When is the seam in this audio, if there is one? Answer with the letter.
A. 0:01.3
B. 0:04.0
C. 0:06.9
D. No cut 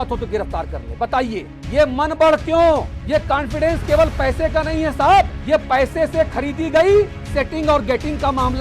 D